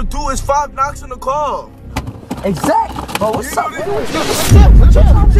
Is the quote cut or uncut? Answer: uncut